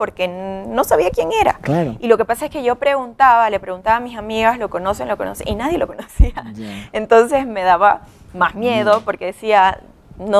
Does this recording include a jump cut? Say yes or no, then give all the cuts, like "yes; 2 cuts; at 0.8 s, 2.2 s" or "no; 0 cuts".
no; 0 cuts